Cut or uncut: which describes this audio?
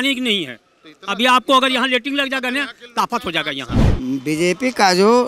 cut